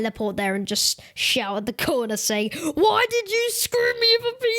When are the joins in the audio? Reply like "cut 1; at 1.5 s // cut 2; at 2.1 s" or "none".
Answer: none